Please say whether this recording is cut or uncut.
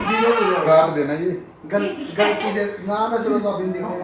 uncut